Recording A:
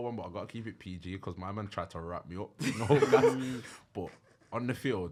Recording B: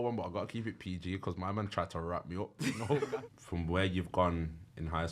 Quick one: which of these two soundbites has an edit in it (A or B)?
B